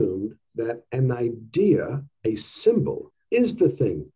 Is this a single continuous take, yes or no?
no